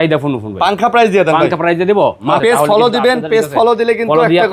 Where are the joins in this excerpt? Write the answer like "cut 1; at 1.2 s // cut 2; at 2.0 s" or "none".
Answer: cut 1; at 2.4 s